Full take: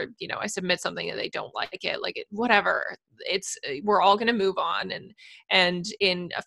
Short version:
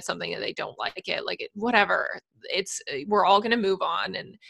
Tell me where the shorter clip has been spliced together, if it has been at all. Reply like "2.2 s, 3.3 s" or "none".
none